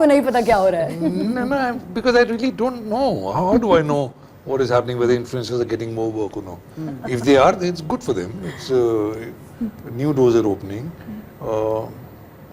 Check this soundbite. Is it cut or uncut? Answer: uncut